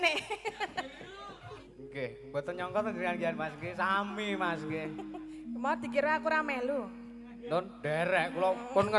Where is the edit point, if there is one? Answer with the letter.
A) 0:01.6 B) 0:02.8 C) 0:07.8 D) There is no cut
A